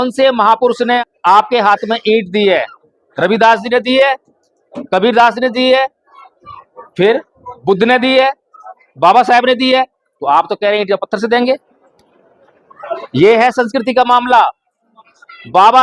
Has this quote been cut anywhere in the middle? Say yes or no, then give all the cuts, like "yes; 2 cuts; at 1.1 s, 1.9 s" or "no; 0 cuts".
yes; 1 cut; at 1.0 s